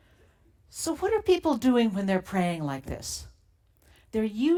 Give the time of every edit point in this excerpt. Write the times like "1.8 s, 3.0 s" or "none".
none